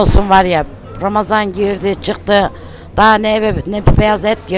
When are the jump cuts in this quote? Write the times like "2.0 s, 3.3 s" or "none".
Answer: none